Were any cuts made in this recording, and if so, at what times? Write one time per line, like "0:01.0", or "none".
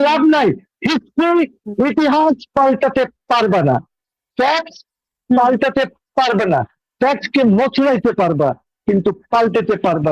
none